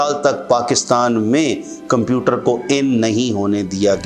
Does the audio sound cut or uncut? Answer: uncut